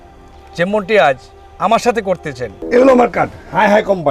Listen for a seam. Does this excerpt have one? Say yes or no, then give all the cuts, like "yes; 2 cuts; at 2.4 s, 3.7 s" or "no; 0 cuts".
yes; 1 cut; at 2.6 s